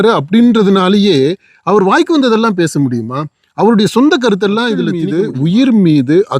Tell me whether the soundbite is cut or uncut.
cut